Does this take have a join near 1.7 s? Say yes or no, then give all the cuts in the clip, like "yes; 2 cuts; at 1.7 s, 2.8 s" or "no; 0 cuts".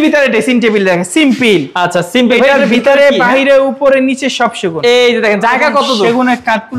no; 0 cuts